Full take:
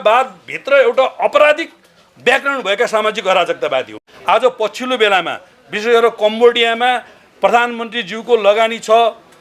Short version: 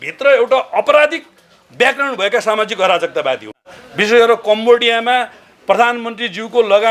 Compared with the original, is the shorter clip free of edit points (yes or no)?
no